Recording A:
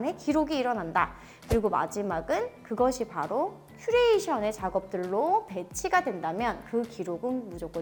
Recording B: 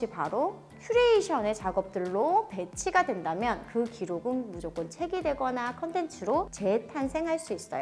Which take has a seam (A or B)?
B